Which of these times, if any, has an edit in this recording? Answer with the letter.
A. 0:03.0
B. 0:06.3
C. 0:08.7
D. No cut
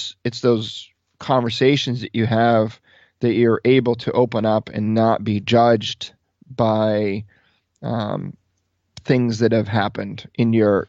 D